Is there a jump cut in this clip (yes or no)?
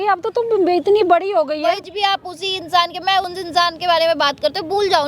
yes